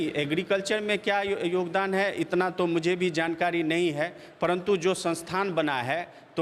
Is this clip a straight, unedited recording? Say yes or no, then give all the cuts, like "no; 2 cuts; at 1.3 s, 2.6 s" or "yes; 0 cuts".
yes; 0 cuts